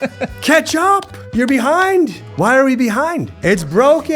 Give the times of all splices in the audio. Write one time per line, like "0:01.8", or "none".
0:01.2
0:03.3

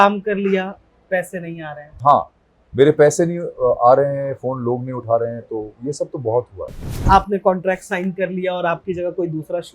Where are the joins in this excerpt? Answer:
0:02.0
0:07.0

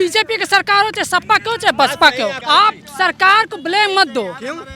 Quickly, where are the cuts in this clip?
0:02.4

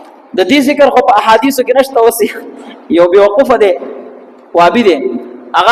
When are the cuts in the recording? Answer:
none

